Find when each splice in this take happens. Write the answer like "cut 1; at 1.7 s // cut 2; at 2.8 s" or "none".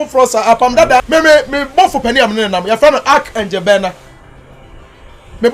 cut 1; at 1.0 s